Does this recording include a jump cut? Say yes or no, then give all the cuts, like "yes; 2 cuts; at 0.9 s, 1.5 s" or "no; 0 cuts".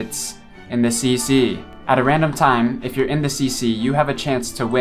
yes; 1 cut; at 1.7 s